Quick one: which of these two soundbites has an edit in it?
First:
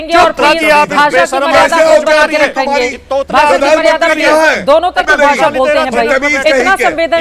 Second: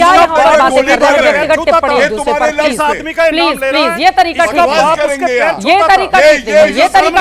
first; 1 cut; at 5.0 s

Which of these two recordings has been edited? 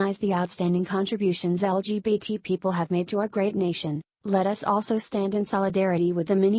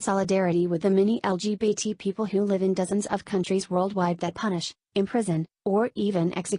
first; 1 cut; at 4.1 s

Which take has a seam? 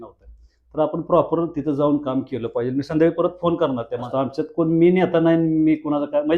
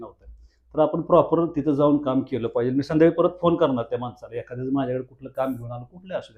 first; 1 cut; at 4.1 s

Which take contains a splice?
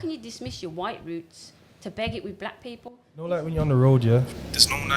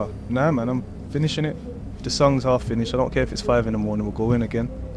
first; 1 cut; at 3.3 s

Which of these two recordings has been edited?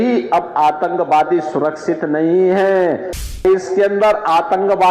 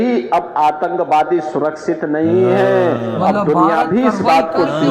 first; 1 cut; at 3.3 s

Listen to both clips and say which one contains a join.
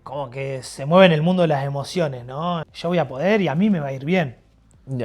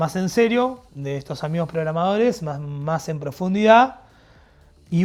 first; 1 cut; at 2.7 s

